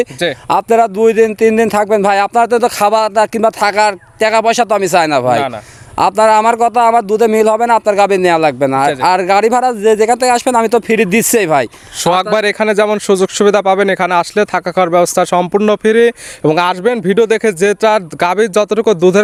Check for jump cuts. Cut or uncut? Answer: uncut